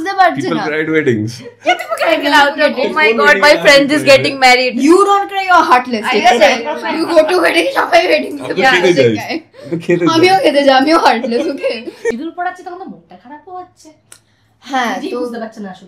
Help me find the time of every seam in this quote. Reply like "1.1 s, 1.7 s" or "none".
12.1 s